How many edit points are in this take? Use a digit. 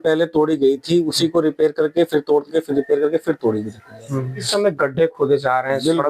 1